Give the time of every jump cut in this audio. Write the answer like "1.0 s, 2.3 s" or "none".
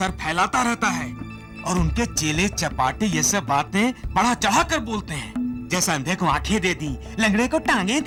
none

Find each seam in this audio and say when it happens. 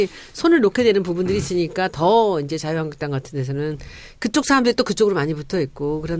5.0 s

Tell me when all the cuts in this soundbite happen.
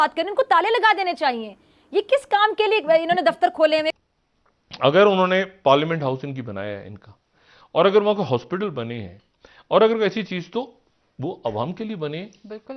3.9 s

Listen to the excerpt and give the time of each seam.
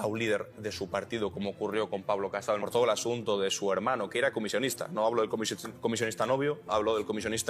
2.6 s

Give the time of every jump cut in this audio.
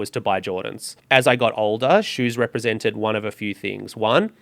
0.9 s

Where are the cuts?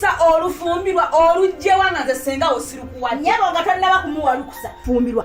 none

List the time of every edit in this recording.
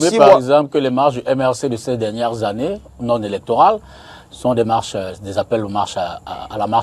none

